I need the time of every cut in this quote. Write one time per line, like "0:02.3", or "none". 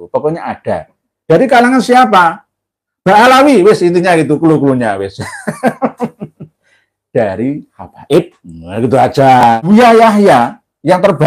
0:09.6